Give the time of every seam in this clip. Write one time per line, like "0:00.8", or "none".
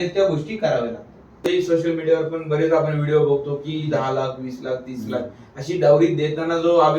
0:01.4